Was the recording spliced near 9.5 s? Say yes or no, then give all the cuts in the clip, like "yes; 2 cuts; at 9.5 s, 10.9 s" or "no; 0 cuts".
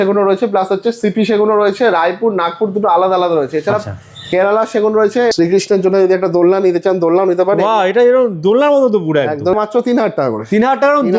yes; 2 cuts; at 5.3 s, 9.5 s